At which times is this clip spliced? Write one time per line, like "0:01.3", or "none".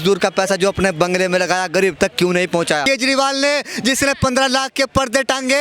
0:02.8

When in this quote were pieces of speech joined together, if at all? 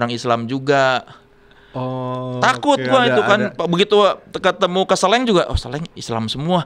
none

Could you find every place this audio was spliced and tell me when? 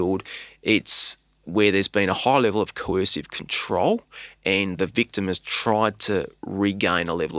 none

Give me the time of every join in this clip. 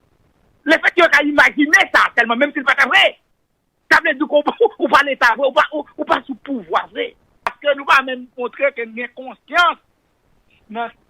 0:07.5

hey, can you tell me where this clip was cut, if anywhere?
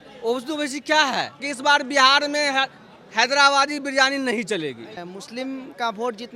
0:01.5
0:05.0

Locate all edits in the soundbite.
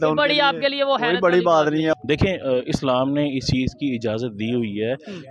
0:01.9

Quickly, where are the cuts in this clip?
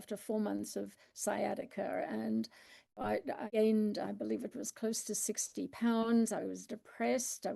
none

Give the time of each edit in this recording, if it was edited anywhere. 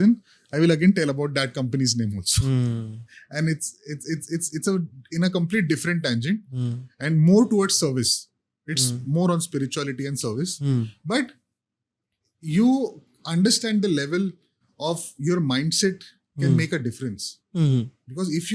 none

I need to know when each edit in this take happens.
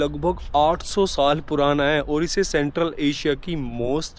none

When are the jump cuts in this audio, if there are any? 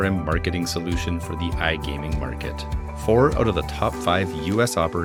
none

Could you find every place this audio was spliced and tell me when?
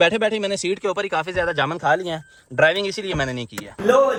none

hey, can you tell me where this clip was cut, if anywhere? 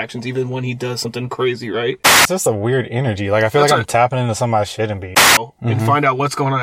0:02.1
0:05.3

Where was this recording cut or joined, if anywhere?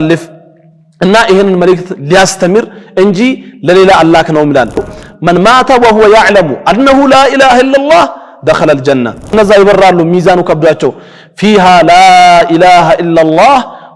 0:04.9
0:09.3

